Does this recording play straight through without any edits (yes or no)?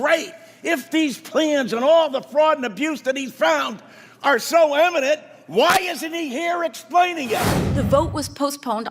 no